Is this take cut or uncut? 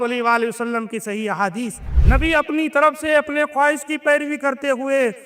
cut